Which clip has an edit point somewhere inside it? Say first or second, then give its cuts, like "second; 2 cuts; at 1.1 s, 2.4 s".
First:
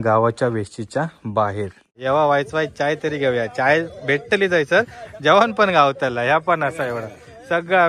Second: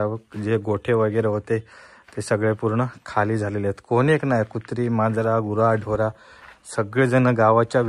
first; 1 cut; at 1.9 s